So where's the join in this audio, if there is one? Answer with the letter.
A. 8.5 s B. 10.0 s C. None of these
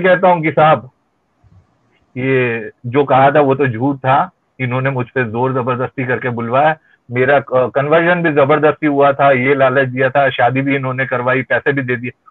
C